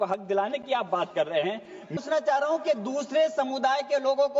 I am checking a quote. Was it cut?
yes; 1 cut; at 2.0 s

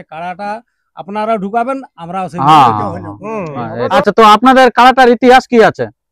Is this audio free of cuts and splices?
no; 1 cut; at 3.8 s

